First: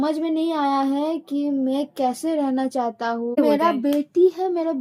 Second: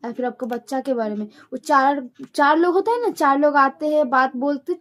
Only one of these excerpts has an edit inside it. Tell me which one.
first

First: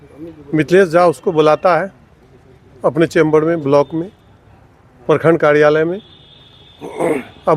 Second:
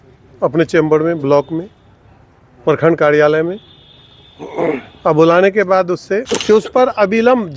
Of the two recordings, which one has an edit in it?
second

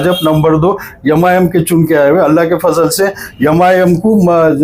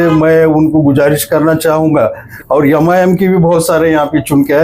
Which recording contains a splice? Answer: second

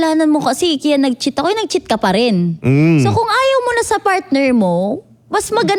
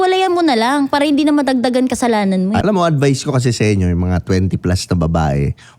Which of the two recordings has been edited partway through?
second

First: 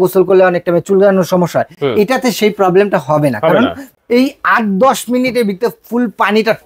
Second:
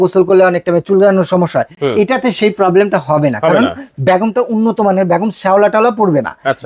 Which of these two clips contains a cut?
first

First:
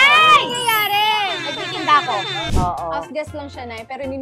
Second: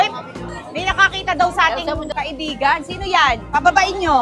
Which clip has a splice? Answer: first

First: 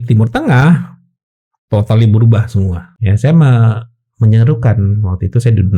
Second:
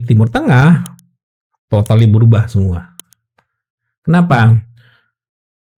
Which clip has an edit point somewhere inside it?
first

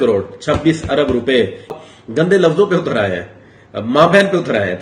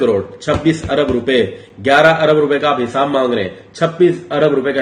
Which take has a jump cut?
first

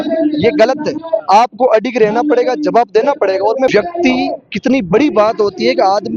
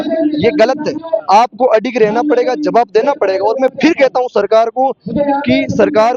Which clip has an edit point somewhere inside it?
first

